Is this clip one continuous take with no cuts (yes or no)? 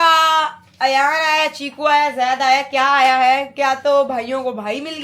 yes